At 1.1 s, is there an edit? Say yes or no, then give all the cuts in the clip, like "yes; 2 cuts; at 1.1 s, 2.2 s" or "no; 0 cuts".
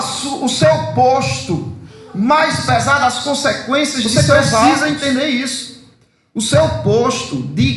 no; 1 cut; at 4.7 s